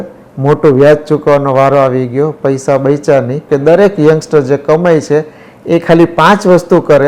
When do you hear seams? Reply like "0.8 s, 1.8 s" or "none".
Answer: 3.4 s